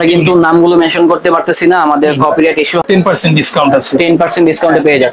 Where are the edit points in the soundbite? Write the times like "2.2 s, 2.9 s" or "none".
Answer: 2.8 s